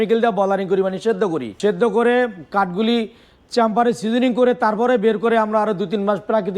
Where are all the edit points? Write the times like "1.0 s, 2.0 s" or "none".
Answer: 1.5 s

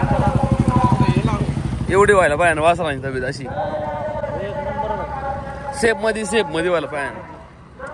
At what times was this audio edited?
none

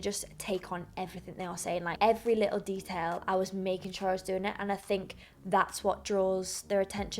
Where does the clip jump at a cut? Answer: 1.9 s

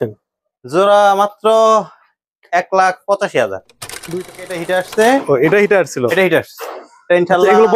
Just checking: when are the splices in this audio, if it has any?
4.1 s

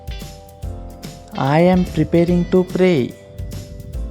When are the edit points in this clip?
1.2 s, 3.2 s

